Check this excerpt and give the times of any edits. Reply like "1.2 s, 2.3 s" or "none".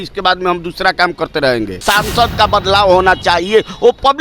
1.8 s